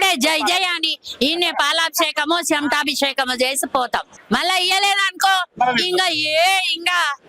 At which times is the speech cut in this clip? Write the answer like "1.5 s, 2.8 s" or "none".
4.1 s